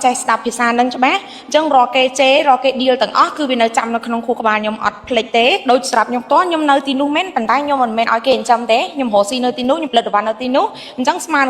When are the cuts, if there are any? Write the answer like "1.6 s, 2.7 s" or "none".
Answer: 5.6 s